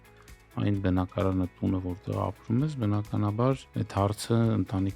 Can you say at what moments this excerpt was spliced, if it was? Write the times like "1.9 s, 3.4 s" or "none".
3.7 s